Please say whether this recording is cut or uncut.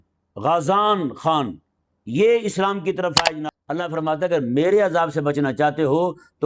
cut